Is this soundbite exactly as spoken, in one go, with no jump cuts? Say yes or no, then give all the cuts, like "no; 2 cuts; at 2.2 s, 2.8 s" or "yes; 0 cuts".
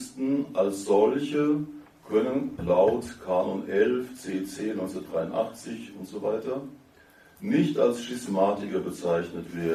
yes; 0 cuts